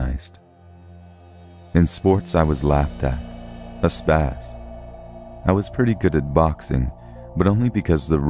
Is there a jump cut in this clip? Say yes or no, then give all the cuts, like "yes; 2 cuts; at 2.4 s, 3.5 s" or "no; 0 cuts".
no; 0 cuts